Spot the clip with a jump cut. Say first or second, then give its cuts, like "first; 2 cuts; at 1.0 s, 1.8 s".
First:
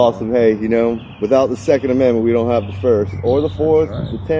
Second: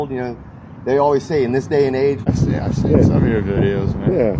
second; 1 cut; at 2.3 s